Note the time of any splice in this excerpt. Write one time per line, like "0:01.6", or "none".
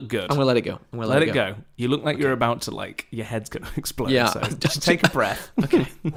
none